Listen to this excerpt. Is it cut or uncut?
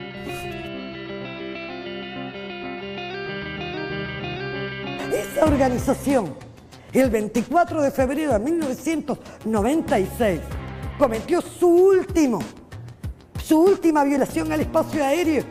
uncut